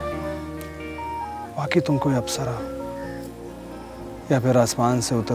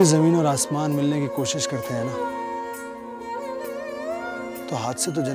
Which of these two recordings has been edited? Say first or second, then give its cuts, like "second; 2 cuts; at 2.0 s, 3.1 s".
first; 2 cuts; at 1.0 s, 4.1 s